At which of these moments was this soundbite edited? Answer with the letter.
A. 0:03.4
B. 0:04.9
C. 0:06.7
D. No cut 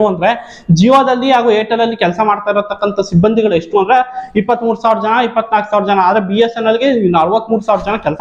D